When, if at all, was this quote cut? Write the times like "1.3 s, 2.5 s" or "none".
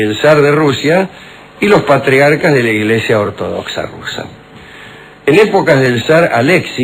5.0 s